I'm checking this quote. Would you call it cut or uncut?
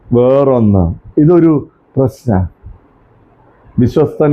uncut